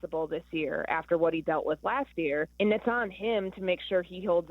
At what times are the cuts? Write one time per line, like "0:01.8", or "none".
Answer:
0:02.5